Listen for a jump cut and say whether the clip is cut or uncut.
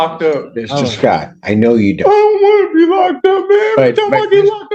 uncut